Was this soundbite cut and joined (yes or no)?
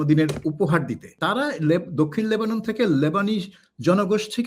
yes